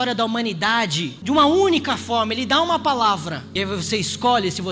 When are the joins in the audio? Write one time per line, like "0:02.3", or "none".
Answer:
0:01.1
0:03.4